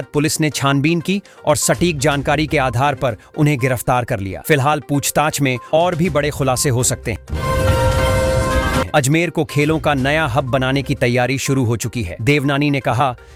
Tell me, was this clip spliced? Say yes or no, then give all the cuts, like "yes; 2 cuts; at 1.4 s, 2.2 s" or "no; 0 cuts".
no; 0 cuts